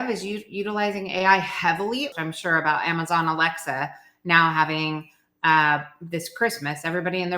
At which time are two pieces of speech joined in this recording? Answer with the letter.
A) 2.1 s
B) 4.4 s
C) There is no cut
A